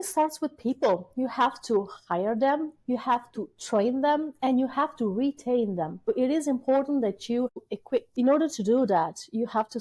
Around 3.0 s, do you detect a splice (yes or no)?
no